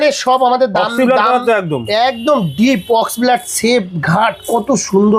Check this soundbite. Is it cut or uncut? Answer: uncut